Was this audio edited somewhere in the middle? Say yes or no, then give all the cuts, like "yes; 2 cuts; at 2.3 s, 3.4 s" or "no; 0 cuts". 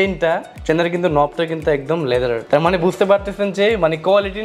no; 0 cuts